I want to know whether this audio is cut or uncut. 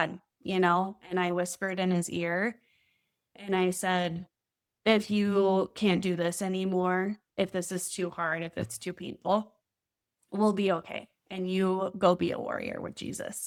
uncut